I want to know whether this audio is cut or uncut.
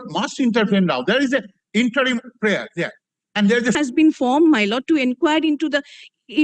cut